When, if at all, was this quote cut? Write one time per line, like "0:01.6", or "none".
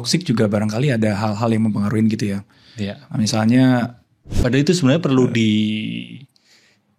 0:04.3